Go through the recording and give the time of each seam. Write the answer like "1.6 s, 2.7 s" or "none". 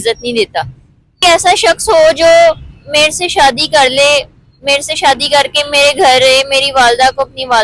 1.2 s